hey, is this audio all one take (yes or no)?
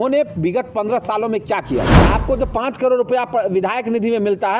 no